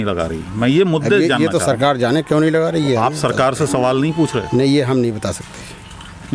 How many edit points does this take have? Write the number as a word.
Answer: zero